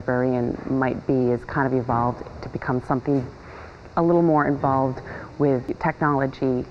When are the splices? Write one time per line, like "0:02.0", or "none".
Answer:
0:05.7